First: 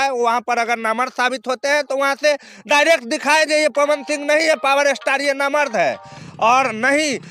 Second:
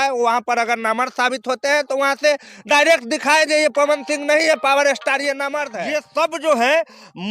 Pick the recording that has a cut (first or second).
second